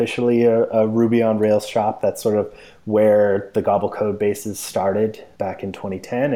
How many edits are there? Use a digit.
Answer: 0